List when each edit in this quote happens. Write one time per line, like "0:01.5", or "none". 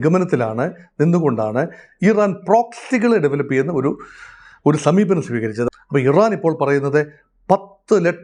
0:05.7